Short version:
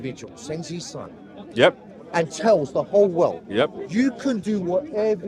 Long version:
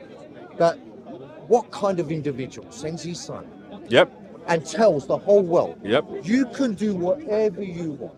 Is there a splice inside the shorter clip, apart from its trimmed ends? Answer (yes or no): no